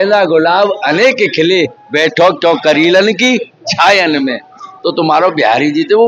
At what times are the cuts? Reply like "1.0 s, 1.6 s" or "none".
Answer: 4.7 s